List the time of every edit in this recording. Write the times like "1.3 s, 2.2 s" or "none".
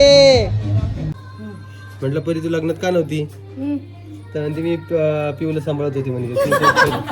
1.2 s